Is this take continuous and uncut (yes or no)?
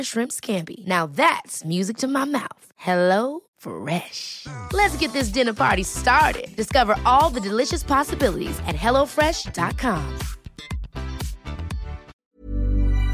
no